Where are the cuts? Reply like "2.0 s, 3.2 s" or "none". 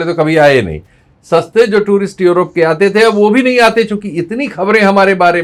none